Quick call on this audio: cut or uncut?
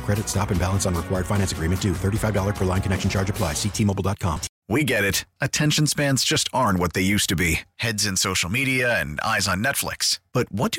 cut